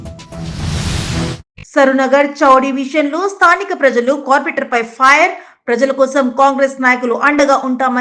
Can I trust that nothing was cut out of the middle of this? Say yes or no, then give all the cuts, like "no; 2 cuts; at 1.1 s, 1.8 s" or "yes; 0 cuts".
no; 1 cut; at 1.4 s